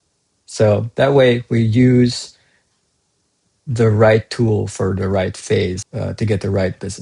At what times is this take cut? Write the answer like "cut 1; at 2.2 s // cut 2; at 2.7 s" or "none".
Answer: cut 1; at 5.8 s